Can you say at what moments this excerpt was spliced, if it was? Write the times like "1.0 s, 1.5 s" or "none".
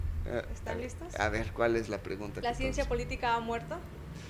none